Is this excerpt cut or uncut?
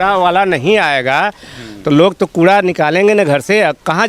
uncut